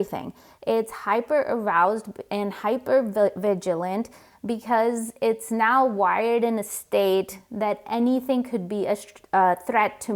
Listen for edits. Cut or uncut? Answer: uncut